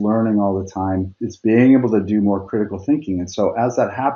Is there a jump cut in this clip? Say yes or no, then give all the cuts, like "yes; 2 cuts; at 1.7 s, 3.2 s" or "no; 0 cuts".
yes; 1 cut; at 1.2 s